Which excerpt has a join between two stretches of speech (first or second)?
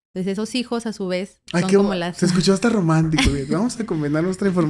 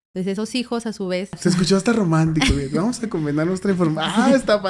second